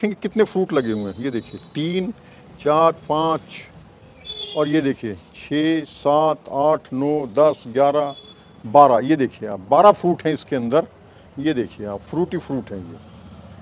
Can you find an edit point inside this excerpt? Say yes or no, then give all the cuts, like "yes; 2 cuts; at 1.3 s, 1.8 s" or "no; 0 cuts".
no; 0 cuts